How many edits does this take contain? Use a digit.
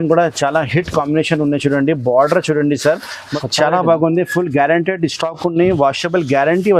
1